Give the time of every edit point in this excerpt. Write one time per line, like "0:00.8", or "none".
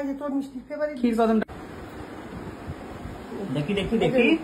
0:01.5